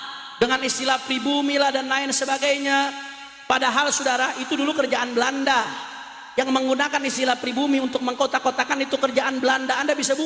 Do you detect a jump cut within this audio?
no; 0 cuts

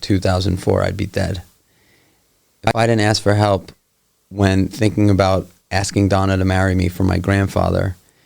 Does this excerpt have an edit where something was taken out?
no; 0 cuts

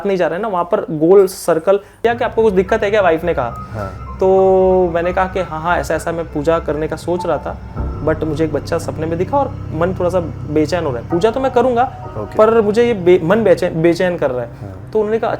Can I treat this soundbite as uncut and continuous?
no; 1 cut; at 2.0 s

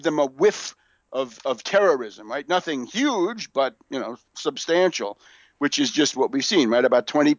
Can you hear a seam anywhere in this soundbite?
no; 0 cuts

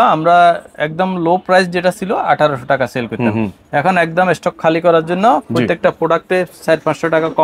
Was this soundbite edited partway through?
no; 0 cuts

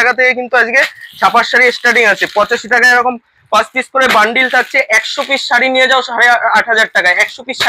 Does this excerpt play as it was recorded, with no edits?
yes; 0 cuts

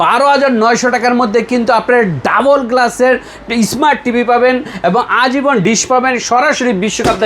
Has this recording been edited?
yes; 1 cut; at 5.6 s

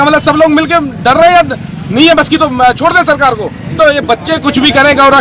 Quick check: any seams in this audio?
yes; 1 cut; at 3.8 s

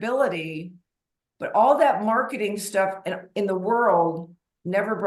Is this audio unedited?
yes; 0 cuts

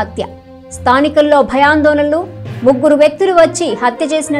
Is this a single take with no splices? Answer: yes; 0 cuts

